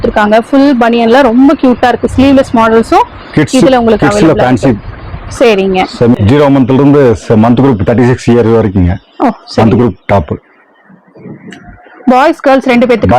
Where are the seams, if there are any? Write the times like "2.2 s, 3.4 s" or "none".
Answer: 6.2 s

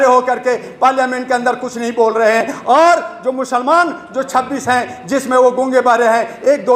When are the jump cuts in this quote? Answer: none

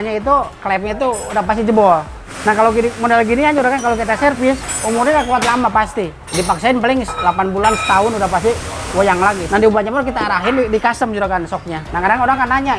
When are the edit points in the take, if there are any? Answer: none

